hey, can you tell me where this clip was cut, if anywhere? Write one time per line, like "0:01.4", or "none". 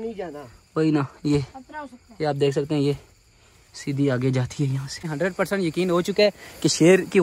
0:05.1